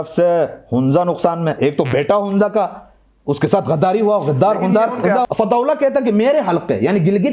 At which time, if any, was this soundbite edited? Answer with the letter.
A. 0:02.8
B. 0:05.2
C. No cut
B